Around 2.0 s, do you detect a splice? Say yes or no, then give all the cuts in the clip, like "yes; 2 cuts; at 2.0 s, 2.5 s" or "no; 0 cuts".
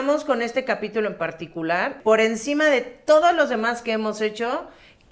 yes; 1 cut; at 2.0 s